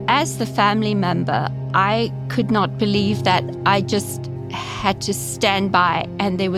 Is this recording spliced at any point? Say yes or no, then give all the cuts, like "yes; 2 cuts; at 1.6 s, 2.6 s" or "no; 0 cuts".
no; 0 cuts